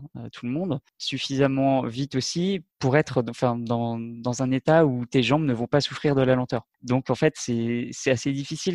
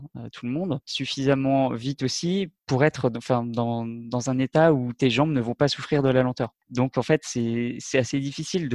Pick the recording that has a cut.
second; 1 cut; at 0.9 s

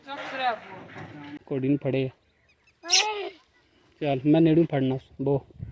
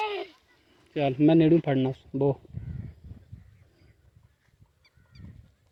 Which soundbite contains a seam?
first; 1 cut; at 1.3 s

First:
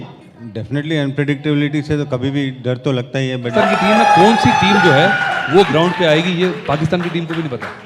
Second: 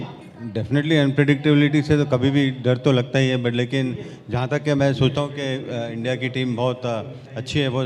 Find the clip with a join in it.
first; 1 cut; at 3.5 s

